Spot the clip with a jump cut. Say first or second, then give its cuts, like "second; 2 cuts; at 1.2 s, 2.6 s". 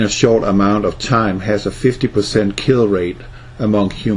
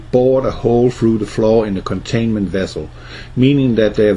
first; 1 cut; at 1.7 s